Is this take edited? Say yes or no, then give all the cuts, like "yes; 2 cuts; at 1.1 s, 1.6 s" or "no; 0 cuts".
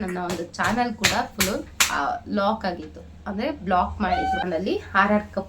yes; 1 cut; at 4.4 s